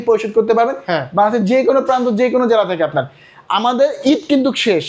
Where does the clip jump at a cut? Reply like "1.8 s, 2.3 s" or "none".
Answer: none